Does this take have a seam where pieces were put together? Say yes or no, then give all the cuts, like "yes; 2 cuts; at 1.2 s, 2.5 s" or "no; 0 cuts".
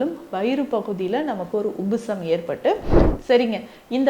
yes; 1 cut; at 3.0 s